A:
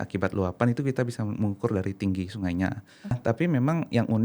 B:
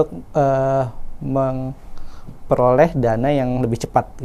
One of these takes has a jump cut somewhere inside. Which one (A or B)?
A